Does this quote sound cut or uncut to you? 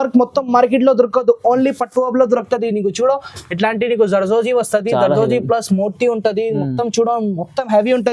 uncut